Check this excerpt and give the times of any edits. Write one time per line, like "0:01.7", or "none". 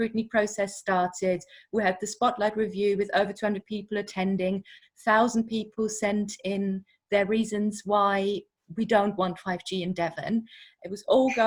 none